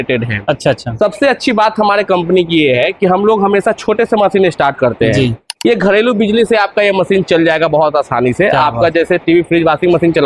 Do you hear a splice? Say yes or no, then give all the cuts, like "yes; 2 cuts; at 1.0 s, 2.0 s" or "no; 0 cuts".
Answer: no; 0 cuts